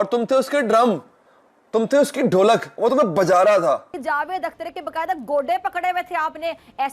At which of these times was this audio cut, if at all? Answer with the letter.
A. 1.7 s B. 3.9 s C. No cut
B